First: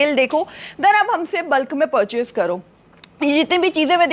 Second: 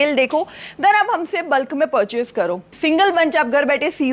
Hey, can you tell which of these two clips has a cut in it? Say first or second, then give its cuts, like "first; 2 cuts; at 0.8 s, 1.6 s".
second; 1 cut; at 2.7 s